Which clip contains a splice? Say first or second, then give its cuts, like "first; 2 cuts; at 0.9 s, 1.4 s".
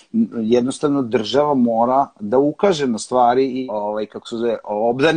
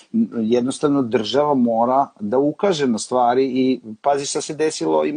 first; 1 cut; at 3.6 s